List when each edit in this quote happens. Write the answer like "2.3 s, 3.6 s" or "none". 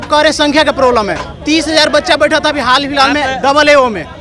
none